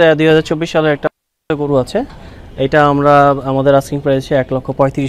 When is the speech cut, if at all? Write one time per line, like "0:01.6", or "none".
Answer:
none